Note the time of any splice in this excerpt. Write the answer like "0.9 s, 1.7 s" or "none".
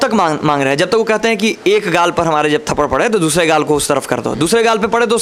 none